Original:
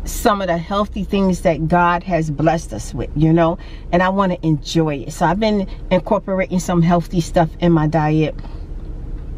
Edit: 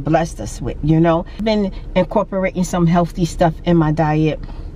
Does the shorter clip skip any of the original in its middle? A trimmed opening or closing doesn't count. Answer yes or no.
yes